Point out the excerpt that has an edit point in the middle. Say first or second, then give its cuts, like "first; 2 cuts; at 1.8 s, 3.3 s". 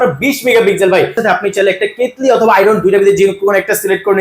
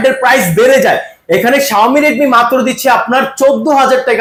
first; 1 cut; at 1.2 s